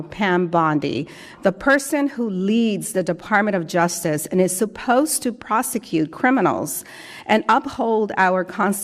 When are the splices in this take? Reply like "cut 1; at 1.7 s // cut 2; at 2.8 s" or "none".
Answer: none